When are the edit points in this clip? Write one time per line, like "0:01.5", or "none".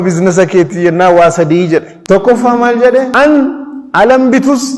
0:01.9
0:03.1